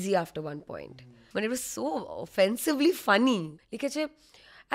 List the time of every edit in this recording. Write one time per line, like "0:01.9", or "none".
0:01.1
0:03.5